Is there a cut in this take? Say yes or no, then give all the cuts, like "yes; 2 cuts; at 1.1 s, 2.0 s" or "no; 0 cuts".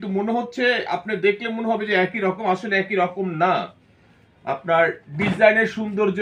no; 0 cuts